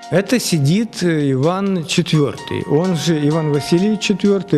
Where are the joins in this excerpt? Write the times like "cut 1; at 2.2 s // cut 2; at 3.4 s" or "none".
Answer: none